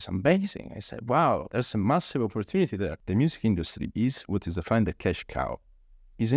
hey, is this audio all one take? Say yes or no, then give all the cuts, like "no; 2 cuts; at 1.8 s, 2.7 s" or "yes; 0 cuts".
no; 1 cut; at 3.0 s